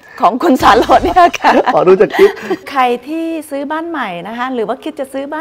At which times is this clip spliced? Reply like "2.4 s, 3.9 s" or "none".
2.6 s